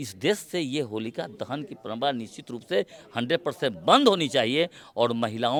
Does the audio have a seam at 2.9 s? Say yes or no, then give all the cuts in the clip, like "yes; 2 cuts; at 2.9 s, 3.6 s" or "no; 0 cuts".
no; 0 cuts